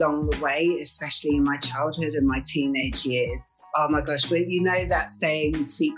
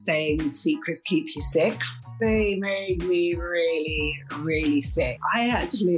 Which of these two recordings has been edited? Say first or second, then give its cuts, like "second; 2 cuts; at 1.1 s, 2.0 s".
second; 1 cut; at 2.1 s